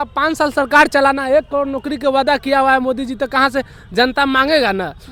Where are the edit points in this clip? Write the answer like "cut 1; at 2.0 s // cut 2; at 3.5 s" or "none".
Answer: none